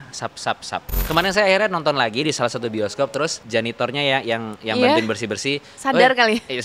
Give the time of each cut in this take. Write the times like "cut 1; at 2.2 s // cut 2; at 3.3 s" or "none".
cut 1; at 1.0 s // cut 2; at 3.4 s